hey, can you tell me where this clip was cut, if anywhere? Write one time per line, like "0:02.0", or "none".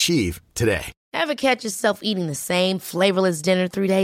0:01.0